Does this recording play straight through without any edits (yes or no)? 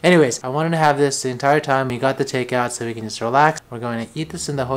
no